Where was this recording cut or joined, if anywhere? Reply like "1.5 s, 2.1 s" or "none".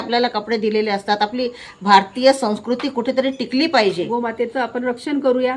4.1 s